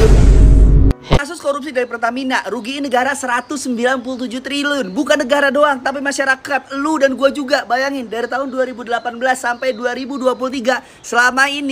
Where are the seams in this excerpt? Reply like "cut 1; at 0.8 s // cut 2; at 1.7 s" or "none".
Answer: cut 1; at 1.2 s